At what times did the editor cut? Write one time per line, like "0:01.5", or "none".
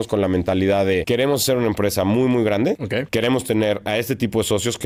none